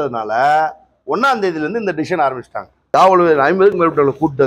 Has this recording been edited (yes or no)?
yes